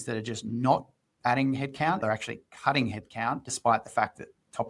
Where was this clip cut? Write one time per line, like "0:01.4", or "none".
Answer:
0:02.0